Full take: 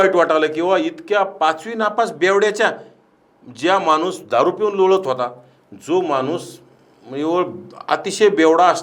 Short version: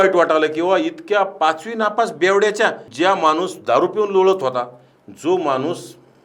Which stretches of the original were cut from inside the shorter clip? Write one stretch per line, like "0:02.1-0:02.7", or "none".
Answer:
0:02.8-0:03.5